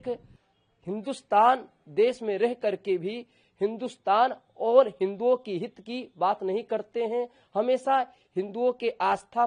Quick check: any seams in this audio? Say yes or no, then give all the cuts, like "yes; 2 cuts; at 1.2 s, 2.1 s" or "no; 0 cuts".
no; 0 cuts